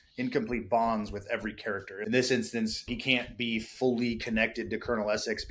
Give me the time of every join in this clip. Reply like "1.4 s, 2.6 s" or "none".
1.9 s, 2.9 s